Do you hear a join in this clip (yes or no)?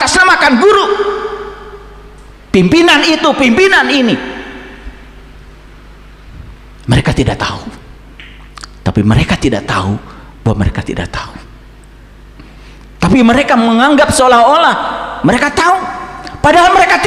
no